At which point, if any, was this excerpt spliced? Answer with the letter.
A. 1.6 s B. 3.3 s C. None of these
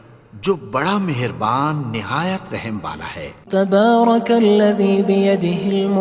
B